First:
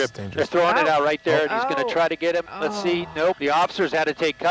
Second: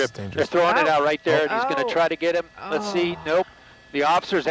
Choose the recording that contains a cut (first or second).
first